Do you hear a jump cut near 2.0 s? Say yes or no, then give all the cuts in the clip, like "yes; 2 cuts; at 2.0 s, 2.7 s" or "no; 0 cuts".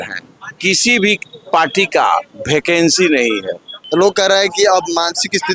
no; 1 cut; at 3.7 s